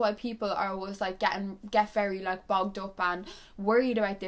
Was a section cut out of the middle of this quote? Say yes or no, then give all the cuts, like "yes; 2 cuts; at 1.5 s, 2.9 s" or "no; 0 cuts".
no; 0 cuts